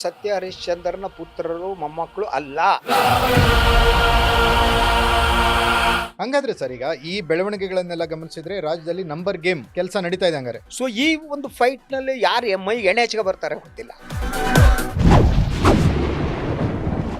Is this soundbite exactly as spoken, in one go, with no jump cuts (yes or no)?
no